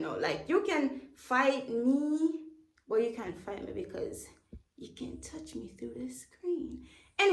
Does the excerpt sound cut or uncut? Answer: uncut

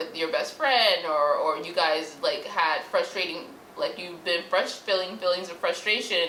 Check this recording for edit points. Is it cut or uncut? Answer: uncut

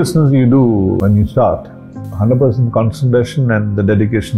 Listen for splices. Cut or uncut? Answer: cut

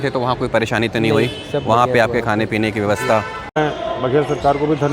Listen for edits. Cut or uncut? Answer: cut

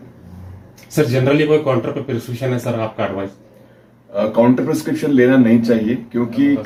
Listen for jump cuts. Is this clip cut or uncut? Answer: uncut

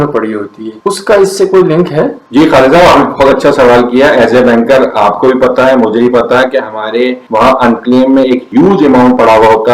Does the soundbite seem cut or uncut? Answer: uncut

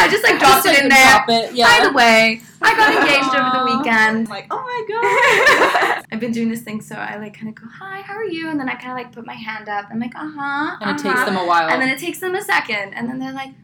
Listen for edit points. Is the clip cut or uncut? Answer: cut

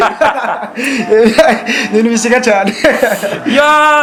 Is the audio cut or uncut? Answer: uncut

